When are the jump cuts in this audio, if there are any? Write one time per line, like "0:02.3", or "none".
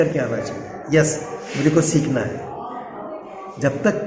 none